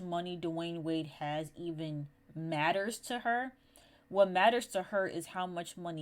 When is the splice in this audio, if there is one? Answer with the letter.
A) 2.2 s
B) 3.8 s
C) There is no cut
C